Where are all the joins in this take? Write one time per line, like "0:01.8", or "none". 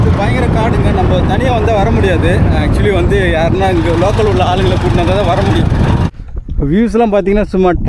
0:06.1